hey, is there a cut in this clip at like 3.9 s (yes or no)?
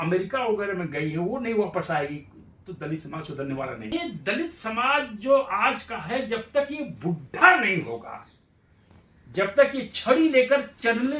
yes